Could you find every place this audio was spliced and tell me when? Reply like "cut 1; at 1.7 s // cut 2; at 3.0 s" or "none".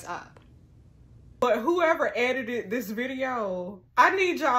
cut 1; at 1.4 s